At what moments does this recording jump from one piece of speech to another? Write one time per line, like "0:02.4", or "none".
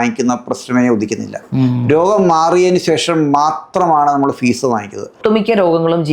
0:05.2